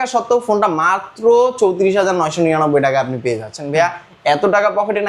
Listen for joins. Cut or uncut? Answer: uncut